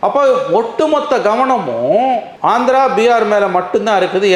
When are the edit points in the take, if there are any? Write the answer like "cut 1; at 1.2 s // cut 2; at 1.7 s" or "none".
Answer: none